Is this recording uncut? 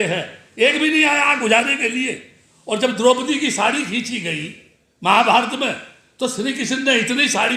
yes; 0 cuts

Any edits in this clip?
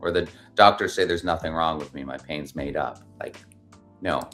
no; 0 cuts

